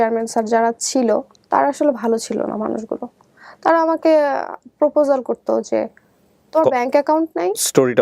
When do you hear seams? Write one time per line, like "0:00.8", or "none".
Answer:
0:01.4